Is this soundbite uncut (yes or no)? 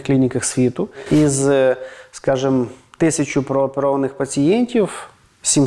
no